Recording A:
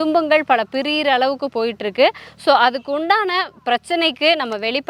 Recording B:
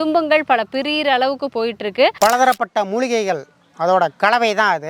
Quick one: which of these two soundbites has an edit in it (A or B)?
B